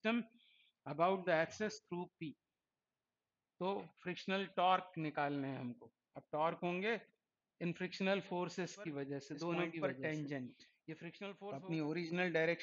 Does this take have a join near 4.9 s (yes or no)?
no